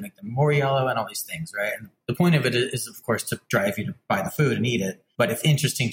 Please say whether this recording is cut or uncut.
cut